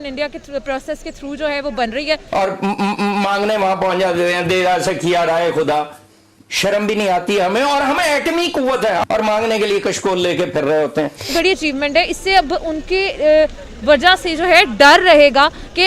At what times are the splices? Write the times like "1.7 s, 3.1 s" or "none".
2.2 s, 9.0 s, 11.3 s